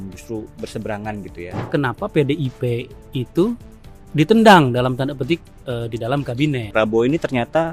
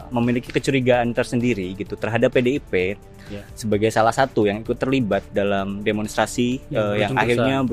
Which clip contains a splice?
first; 2 cuts; at 1.6 s, 6.7 s

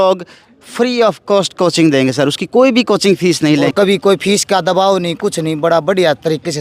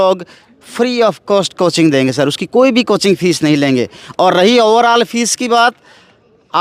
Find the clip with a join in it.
first; 1 cut; at 3.7 s

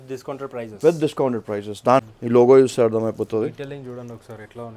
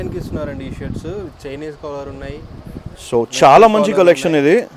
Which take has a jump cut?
first; 1 cut; at 2.0 s

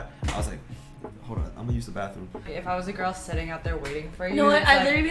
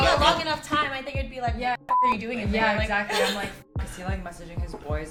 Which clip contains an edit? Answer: first; 1 cut; at 2.5 s

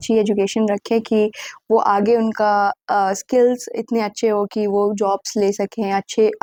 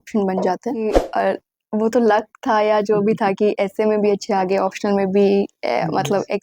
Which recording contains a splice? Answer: second; 1 cut; at 1.0 s

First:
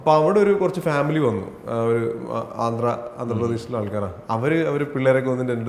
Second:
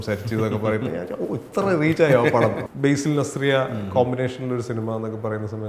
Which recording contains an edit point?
second; 1 cut; at 2.7 s

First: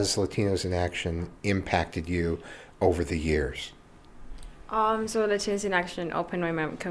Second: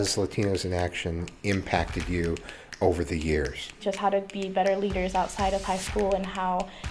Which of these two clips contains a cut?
second; 1 cut; at 3.7 s

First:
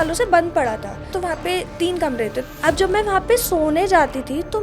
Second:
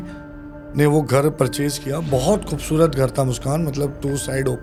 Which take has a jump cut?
first; 2 cuts; at 1.1 s, 2.5 s

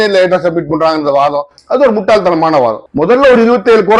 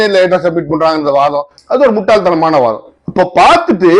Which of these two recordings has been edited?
first; 1 cut; at 2.8 s

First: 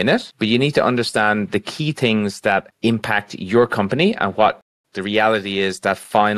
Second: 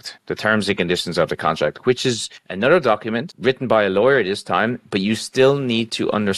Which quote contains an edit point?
first; 1 cut; at 4.7 s

